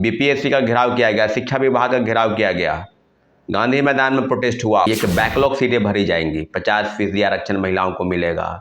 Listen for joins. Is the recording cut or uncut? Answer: cut